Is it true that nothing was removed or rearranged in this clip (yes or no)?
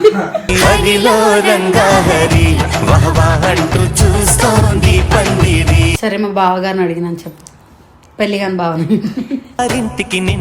no